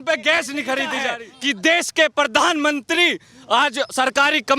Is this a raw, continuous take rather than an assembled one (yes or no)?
no